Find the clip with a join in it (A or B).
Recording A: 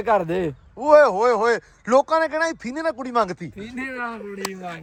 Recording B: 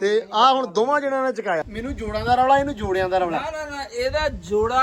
B